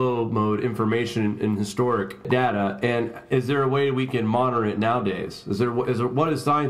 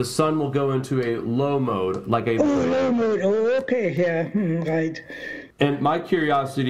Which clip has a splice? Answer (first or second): second